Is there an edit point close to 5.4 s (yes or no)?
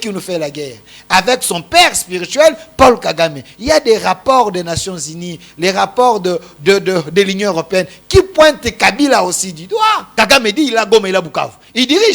no